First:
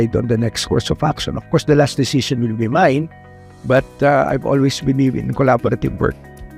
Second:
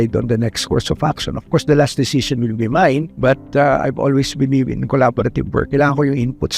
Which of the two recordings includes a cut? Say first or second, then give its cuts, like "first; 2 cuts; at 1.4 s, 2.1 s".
second; 2 cuts; at 3.1 s, 5.7 s